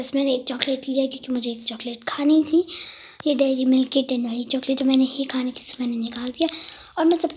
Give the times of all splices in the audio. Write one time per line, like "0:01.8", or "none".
none